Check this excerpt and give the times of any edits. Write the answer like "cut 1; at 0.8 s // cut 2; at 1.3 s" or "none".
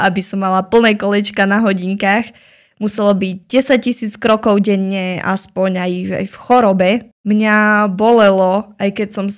none